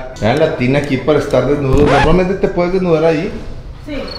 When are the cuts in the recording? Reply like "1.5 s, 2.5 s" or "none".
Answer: none